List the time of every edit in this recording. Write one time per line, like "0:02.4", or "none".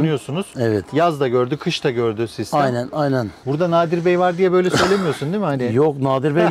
0:03.4